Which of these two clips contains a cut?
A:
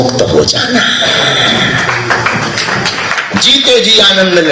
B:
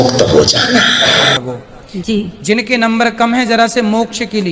B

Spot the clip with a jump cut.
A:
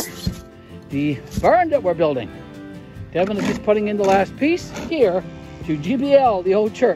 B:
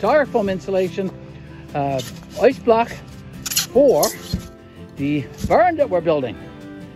A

